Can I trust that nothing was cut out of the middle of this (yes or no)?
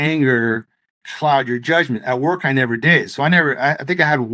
yes